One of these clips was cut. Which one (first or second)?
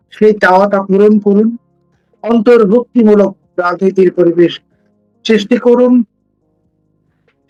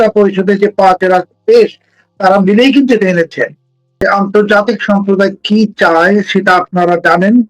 second